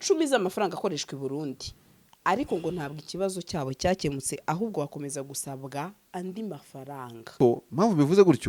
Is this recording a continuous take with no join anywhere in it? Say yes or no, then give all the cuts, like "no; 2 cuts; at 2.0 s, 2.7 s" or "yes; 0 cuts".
no; 1 cut; at 7.4 s